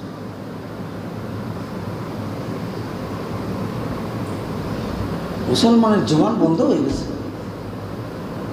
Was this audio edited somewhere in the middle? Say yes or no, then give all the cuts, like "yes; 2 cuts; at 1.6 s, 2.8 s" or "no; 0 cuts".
no; 0 cuts